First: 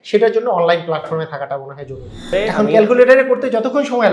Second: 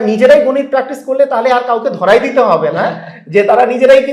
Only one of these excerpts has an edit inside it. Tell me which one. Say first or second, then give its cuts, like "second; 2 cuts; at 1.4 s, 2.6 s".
first; 1 cut; at 2.3 s